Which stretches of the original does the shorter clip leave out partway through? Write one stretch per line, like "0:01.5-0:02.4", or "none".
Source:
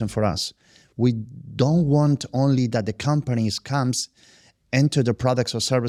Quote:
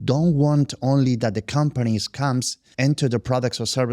0:04.1-0:04.5

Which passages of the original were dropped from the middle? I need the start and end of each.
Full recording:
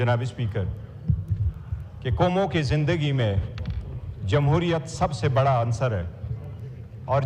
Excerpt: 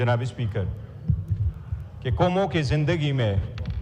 none

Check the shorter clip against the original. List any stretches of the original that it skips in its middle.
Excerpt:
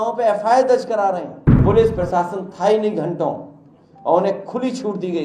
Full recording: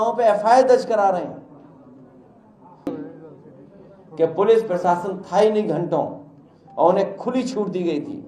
0:01.6-0:04.3

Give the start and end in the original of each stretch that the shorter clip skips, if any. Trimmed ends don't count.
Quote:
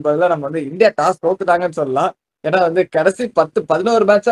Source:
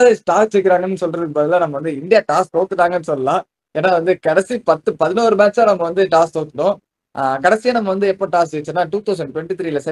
none

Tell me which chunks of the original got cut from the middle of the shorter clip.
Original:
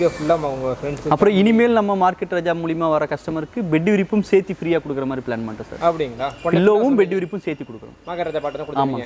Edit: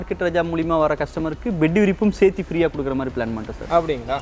none

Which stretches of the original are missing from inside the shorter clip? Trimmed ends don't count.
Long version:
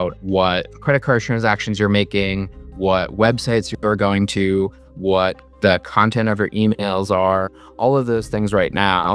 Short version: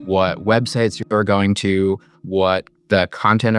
none

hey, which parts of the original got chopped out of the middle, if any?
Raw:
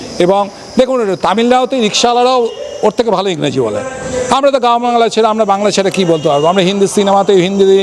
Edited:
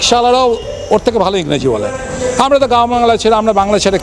none

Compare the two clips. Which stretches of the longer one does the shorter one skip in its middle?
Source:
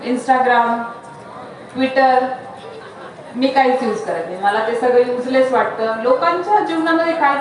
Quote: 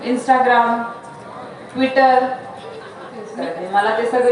0:03.3-0:04.0

